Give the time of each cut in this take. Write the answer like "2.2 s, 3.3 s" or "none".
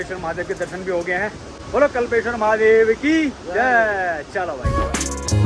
none

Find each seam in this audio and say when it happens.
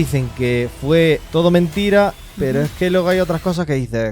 1.2 s

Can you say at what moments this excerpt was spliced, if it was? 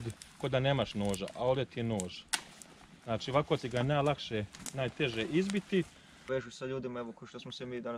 6.3 s

